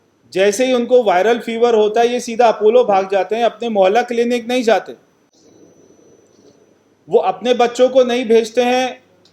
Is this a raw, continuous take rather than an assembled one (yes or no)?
no